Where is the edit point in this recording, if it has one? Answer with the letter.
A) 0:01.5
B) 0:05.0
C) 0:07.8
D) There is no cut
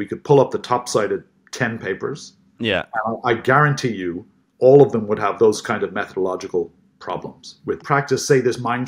C